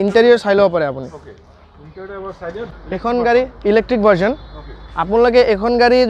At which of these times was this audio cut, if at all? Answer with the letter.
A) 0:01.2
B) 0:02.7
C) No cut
B